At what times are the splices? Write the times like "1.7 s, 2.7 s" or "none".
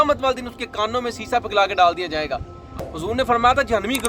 2.8 s

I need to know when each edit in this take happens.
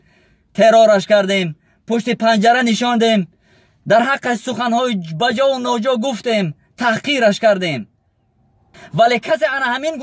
8.8 s

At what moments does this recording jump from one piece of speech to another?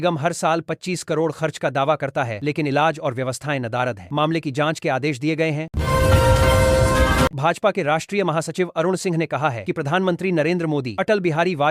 none

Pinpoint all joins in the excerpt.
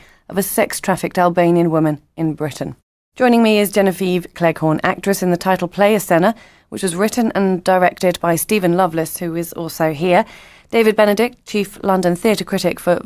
2.4 s

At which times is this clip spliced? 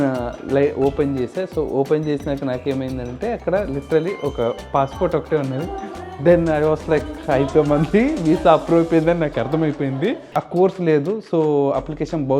10.3 s

